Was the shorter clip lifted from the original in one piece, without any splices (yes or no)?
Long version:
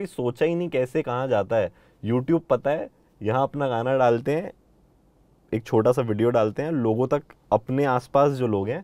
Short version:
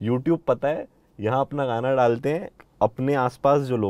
no